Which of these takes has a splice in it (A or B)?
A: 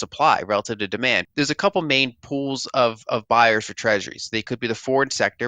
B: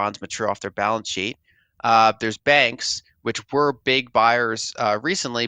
A